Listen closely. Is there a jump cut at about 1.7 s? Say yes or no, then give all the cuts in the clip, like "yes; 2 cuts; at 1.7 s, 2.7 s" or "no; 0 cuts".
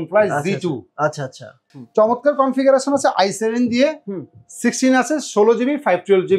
yes; 1 cut; at 1.7 s